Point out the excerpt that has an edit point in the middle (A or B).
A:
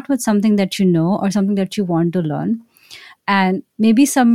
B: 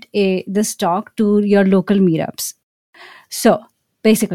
B